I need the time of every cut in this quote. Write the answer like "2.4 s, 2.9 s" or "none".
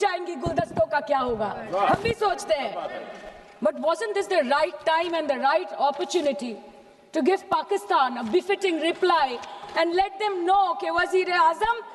none

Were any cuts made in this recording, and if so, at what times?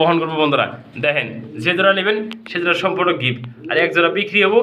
none

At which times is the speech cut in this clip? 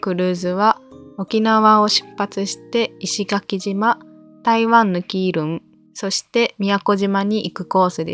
none

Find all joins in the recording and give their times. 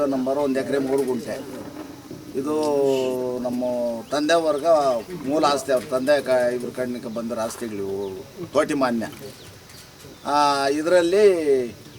none

